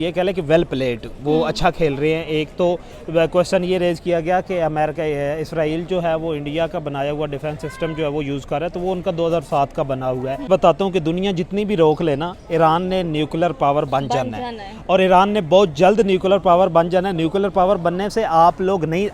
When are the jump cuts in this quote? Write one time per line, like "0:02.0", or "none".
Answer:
0:10.5